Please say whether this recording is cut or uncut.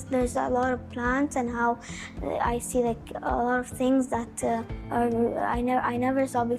uncut